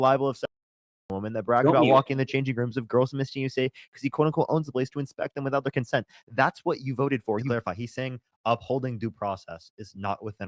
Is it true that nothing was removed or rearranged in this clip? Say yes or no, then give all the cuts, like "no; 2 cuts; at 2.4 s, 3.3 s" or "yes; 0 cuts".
no; 1 cut; at 7.5 s